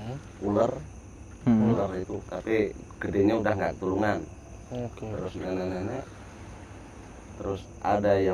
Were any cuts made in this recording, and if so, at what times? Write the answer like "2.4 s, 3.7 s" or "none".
none

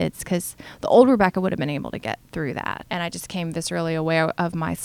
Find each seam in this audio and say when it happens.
2.8 s

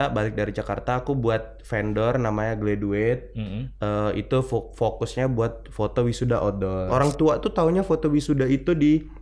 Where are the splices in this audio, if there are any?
6.9 s

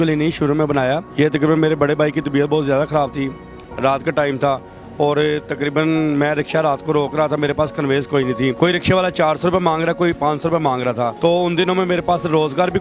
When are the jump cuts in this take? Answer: none

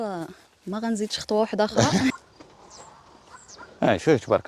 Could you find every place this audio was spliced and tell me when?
2.1 s

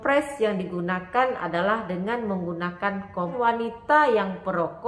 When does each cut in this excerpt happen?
3.3 s

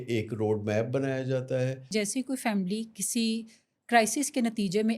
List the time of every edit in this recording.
1.9 s

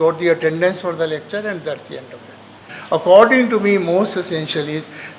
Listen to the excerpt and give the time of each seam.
2.7 s

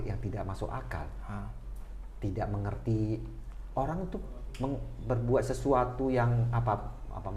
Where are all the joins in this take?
none

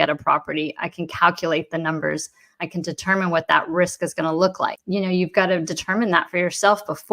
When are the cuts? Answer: 4.8 s

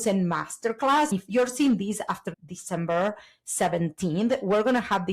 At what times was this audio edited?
1.1 s

